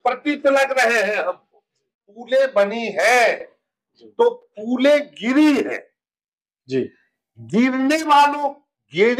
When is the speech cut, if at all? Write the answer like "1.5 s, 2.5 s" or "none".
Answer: 1.9 s